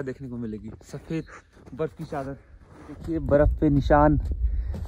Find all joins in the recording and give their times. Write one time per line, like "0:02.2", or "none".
0:03.1